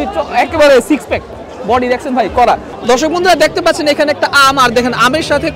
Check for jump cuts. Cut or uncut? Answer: cut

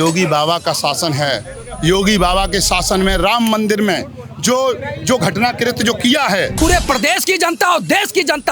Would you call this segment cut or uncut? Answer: cut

